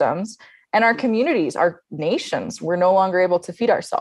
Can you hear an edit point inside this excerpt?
no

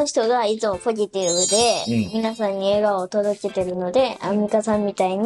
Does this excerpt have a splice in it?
no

